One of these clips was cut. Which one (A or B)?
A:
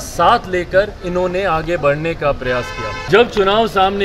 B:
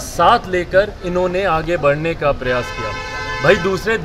A